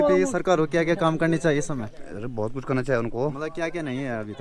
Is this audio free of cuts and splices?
yes; 0 cuts

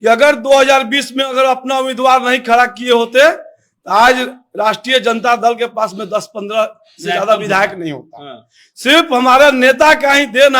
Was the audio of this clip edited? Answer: no; 0 cuts

